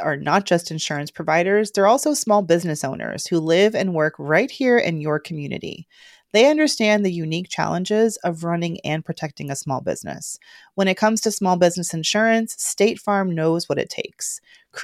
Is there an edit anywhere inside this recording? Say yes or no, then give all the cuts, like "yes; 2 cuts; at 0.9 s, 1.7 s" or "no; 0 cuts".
no; 0 cuts